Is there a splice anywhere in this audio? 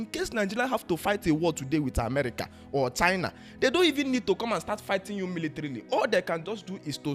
no; 0 cuts

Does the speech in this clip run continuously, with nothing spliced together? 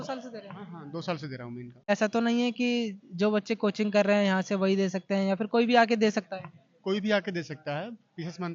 yes; 0 cuts

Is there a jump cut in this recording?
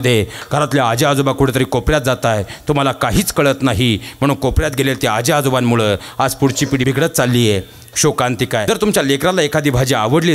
yes; 2 cuts; at 6.8 s, 8.6 s

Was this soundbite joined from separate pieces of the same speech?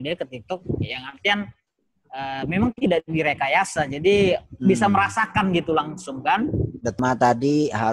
yes; 1 cut; at 7.0 s

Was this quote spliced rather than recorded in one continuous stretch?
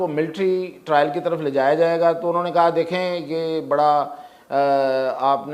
no; 0 cuts

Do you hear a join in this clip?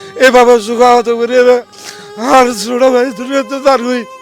no; 0 cuts

